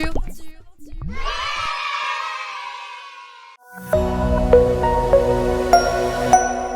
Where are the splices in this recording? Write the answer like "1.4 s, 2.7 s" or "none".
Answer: 3.8 s